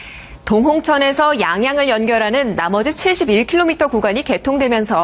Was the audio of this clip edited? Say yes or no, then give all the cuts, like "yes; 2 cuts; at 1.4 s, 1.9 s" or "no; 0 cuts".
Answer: yes; 1 cut; at 2.7 s